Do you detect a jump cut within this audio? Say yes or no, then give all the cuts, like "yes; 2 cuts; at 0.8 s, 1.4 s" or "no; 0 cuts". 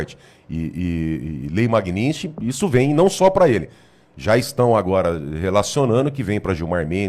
no; 0 cuts